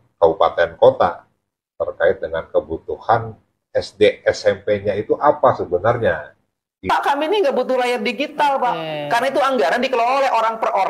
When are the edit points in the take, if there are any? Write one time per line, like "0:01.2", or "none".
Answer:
0:06.8

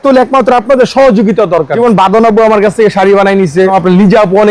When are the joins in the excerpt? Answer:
0:01.7
0:03.7

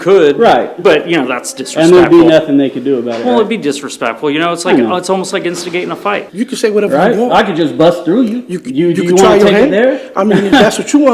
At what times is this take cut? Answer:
0:06.3

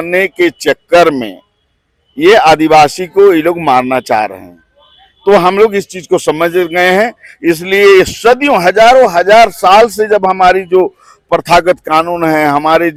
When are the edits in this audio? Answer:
none

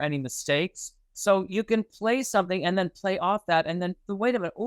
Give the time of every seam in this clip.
none

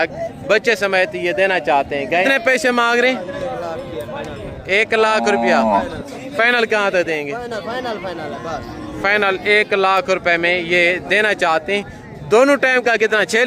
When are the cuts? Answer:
0:02.2

